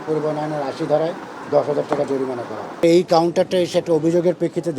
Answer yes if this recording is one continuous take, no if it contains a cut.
no